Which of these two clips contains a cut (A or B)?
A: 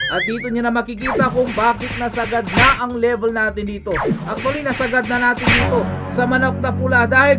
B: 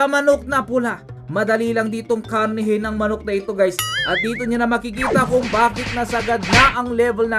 B